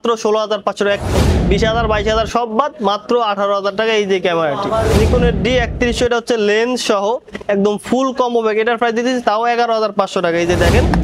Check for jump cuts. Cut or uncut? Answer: cut